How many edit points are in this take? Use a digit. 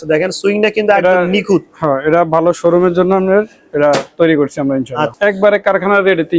1